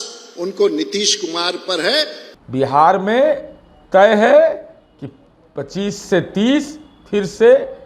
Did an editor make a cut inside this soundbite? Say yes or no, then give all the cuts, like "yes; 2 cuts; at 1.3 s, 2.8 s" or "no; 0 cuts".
yes; 1 cut; at 2.2 s